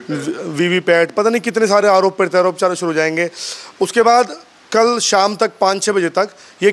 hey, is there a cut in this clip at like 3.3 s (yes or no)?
no